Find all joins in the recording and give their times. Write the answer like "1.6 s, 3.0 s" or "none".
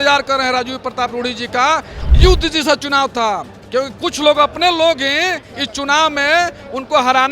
1.9 s

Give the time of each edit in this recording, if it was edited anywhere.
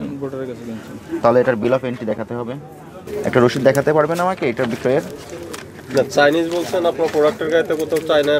none

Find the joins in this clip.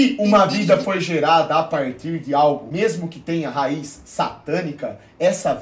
2.7 s

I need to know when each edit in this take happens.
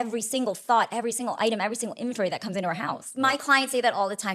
3.0 s

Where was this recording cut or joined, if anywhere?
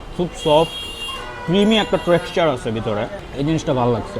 3.2 s

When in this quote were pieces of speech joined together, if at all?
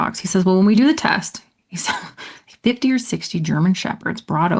none

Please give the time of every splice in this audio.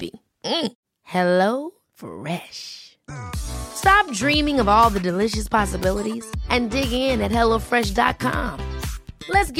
none

